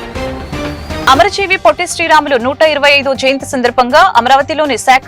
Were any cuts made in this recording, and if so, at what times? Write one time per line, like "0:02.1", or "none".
0:01.0